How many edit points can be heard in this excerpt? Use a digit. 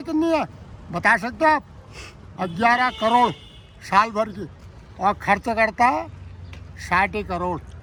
0